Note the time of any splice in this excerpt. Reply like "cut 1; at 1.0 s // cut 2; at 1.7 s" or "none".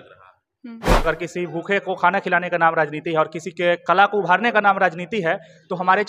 cut 1; at 1.0 s